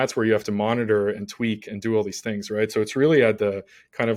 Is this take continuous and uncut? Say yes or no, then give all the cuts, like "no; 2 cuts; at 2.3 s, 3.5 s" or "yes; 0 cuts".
yes; 0 cuts